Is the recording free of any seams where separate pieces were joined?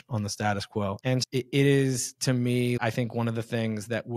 no; 1 cut; at 1.0 s

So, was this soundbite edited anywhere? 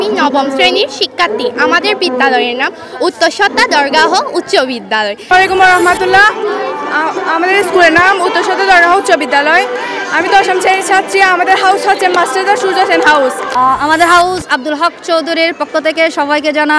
yes; 1 cut; at 5.3 s

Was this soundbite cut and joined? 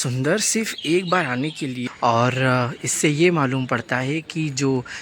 yes; 1 cut; at 1.9 s

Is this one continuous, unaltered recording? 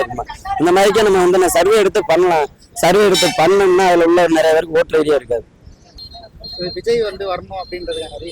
no; 1 cut; at 5.9 s

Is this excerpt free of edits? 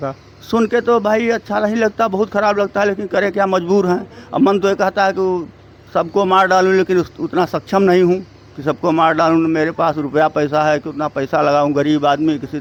yes; 0 cuts

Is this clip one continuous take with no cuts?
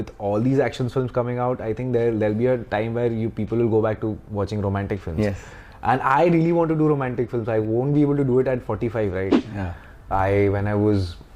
no; 1 cut; at 9.5 s

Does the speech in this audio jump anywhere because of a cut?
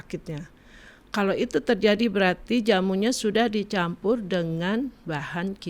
no; 0 cuts

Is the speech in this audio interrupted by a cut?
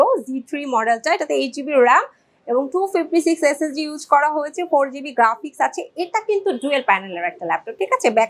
no; 0 cuts

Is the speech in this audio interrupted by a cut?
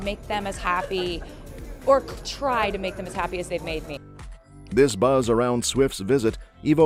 no; 0 cuts

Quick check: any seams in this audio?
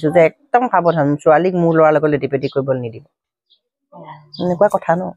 no; 0 cuts

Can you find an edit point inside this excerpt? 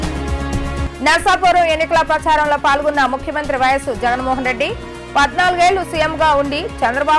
yes; 1 cut; at 0.9 s

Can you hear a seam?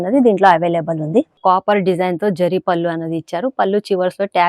yes; 1 cut; at 1.4 s

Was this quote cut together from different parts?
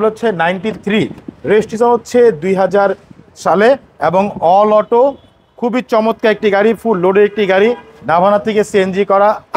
no; 0 cuts

